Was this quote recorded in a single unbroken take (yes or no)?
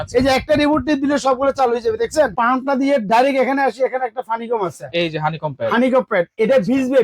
no